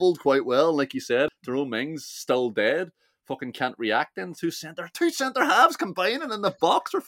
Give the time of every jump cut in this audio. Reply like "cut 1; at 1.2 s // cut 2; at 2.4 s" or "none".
cut 1; at 1.3 s